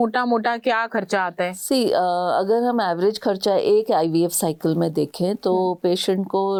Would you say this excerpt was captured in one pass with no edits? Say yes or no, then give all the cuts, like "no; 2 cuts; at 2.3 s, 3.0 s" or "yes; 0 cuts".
yes; 0 cuts